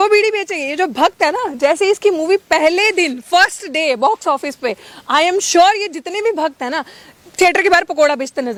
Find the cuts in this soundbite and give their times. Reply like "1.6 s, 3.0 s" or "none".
none